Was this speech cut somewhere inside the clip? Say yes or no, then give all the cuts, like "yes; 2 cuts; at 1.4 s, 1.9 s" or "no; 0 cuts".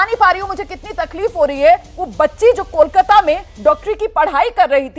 no; 0 cuts